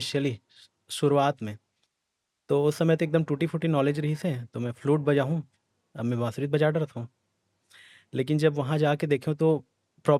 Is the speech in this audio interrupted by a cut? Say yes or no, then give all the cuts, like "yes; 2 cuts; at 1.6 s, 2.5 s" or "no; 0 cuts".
no; 0 cuts